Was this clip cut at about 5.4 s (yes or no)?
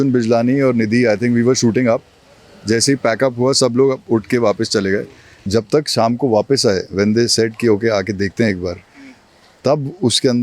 yes